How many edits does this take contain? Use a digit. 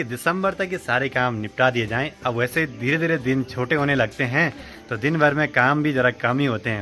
0